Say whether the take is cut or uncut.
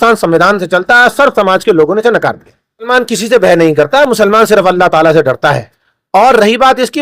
cut